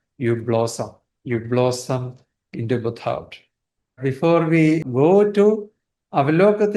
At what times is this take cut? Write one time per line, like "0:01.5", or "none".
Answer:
0:04.0
0:04.9